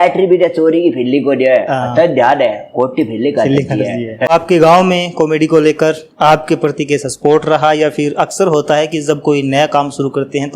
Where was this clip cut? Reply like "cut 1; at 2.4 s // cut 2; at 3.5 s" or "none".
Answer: cut 1; at 4.3 s